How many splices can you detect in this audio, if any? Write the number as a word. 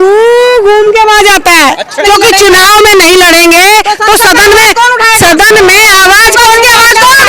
one